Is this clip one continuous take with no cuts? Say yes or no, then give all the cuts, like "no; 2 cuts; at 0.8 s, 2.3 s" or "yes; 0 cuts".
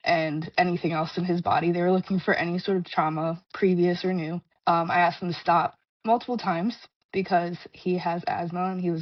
yes; 0 cuts